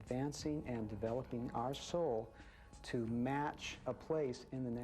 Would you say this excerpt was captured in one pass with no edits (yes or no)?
no